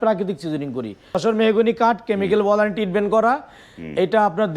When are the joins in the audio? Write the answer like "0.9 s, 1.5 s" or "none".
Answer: 1.2 s